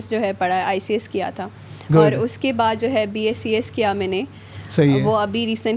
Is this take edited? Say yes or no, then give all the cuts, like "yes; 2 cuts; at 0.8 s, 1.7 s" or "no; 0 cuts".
no; 0 cuts